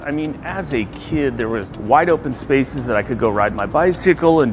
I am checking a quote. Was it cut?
yes; 1 cut; at 1.7 s

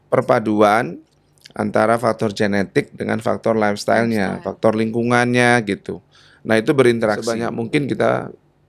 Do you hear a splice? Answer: yes; 1 cut; at 7.3 s

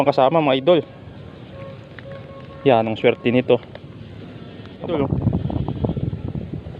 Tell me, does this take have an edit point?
yes; 1 cut; at 4.9 s

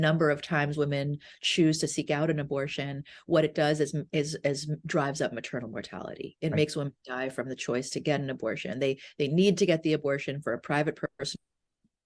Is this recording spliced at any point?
no; 0 cuts

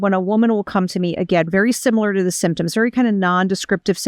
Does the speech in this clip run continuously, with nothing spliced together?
yes; 0 cuts

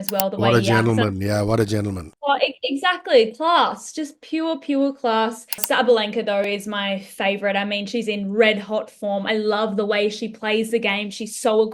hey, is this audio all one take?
no; 1 cut; at 5.6 s

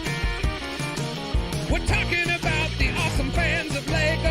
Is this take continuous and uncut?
no; 1 cut; at 1.5 s

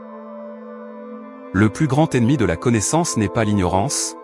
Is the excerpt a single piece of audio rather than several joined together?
no; 1 cut; at 1.5 s

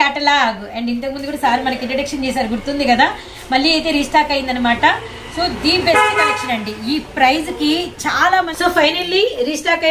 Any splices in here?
yes; 1 cut; at 8.5 s

